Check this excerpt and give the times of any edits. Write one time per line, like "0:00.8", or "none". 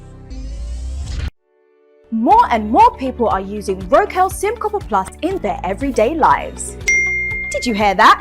0:01.1